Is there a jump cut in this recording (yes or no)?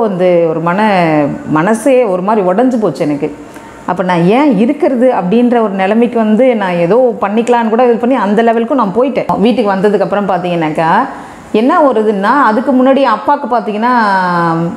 yes